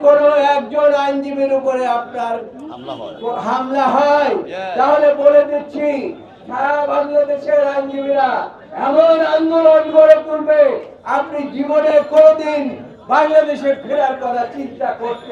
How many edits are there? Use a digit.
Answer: 0